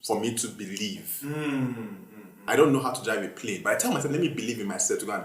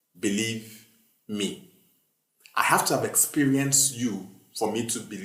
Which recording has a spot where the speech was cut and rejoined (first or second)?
first